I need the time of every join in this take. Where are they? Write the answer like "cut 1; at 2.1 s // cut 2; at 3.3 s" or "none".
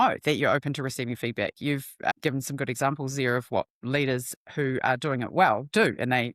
none